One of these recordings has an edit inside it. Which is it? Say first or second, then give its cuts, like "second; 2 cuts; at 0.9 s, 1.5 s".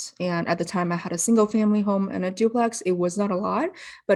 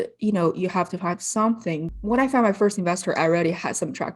second; 1 cut; at 1.9 s